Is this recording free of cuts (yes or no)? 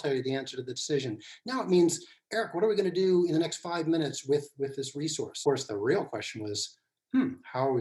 no